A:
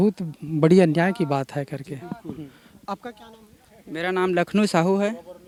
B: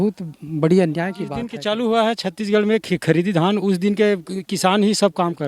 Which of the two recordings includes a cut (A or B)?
B